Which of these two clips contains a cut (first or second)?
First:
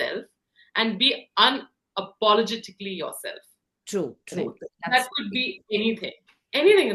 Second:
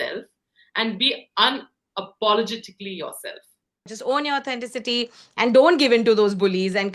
second